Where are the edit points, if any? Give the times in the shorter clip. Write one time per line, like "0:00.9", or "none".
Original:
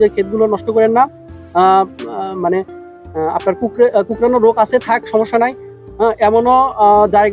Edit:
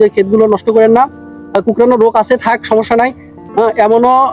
0:01.5